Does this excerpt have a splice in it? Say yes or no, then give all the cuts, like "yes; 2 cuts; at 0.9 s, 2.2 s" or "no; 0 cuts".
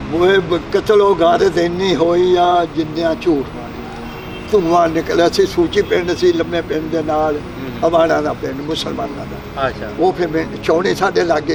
no; 0 cuts